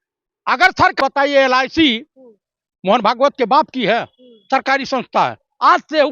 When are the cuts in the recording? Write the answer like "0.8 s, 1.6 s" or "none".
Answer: 1.0 s